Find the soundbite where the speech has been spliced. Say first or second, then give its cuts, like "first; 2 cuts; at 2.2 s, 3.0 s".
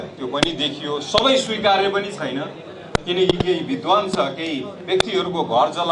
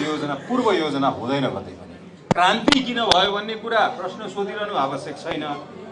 second; 1 cut; at 2.1 s